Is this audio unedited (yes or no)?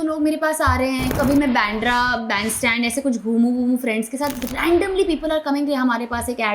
no